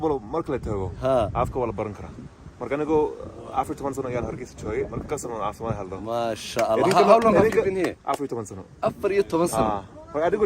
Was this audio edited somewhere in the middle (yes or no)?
no